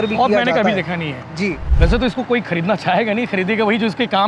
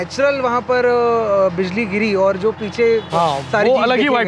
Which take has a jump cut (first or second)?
first